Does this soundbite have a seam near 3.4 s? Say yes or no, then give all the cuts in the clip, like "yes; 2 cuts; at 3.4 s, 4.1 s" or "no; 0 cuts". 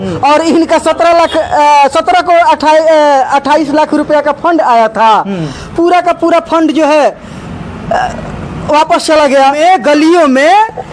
no; 1 cut; at 9.6 s